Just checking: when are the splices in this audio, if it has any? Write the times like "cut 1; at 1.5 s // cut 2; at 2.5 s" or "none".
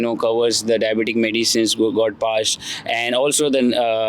none